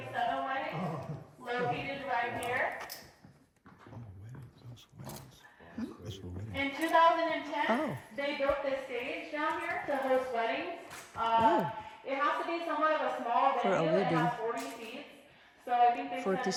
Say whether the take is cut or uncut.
uncut